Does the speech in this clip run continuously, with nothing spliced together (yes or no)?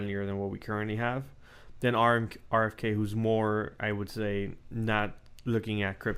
yes